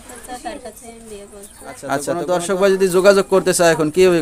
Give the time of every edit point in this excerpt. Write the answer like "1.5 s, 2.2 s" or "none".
2.1 s